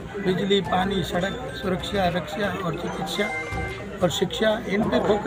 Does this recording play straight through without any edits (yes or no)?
yes